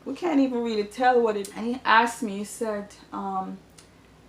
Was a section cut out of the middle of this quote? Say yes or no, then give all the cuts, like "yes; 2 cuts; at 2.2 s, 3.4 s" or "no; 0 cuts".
yes; 1 cut; at 1.4 s